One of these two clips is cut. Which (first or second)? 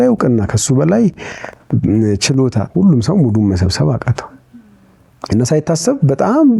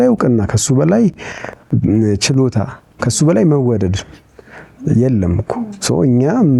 first